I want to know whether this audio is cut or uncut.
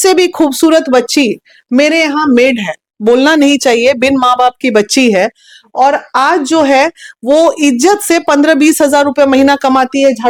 uncut